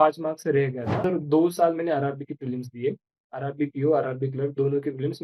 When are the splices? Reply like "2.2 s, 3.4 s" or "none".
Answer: 1.0 s